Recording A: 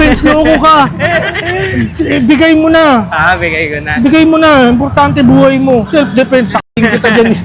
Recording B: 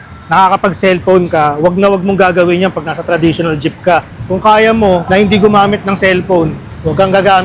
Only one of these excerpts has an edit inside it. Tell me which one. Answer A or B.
A